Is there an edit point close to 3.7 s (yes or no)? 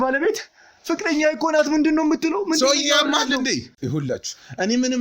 yes